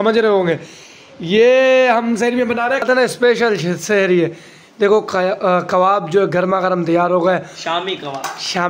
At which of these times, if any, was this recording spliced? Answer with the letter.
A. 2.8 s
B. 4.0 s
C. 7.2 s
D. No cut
A